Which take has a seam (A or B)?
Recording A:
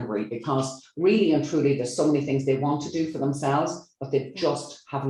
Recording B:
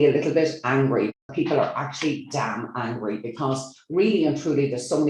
B